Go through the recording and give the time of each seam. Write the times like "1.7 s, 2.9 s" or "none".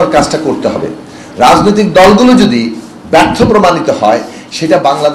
none